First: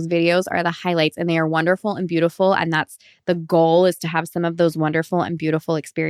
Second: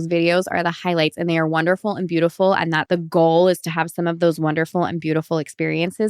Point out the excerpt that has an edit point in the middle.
second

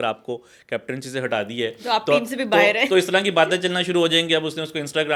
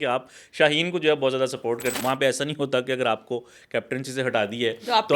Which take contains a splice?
second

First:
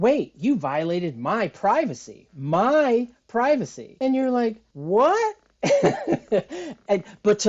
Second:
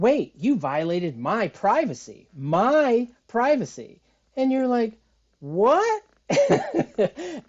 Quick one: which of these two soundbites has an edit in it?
first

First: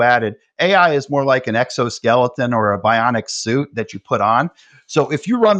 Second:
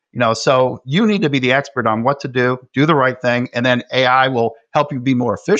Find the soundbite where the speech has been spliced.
second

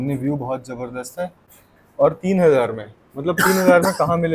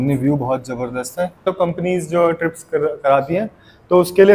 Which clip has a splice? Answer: second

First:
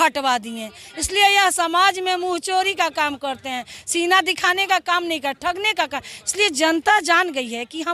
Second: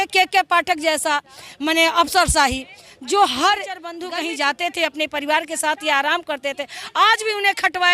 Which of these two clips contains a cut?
second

